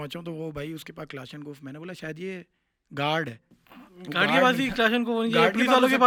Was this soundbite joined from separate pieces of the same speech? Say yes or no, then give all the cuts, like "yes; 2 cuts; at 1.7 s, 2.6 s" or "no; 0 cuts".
no; 0 cuts